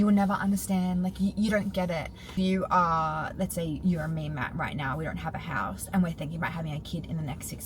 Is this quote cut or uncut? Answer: cut